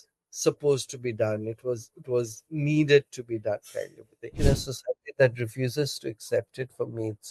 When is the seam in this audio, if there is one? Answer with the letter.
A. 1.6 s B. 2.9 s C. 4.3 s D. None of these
C